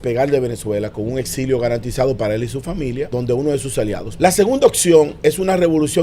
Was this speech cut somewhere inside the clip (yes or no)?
yes